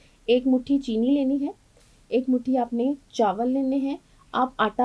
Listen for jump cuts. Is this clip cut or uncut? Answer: uncut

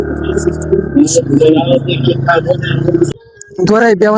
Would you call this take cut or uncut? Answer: cut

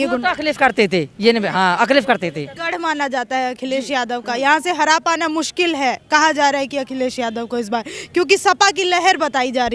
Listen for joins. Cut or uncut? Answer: cut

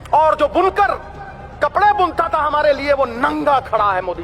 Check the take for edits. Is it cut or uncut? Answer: uncut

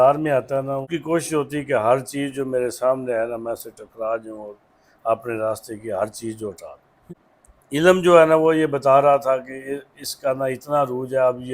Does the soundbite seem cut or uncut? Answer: cut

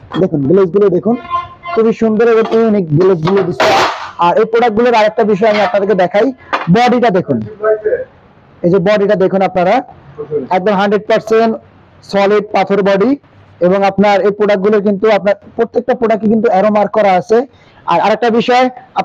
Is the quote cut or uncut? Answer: uncut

